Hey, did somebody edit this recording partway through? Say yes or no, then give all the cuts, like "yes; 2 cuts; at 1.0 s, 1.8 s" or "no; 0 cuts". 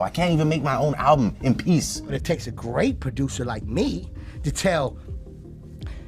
yes; 1 cut; at 2.0 s